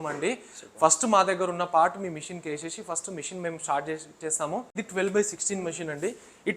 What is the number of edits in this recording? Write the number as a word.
one